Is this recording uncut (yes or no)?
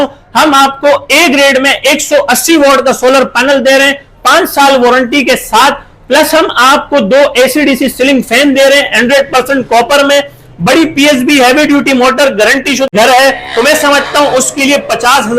no